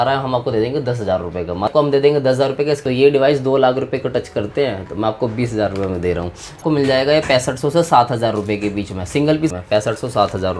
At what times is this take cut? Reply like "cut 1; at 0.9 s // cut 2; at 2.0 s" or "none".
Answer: cut 1; at 1.7 s // cut 2; at 2.8 s // cut 3; at 6.6 s // cut 4; at 9.5 s